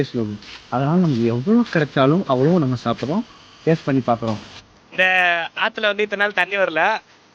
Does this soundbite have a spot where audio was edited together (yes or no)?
yes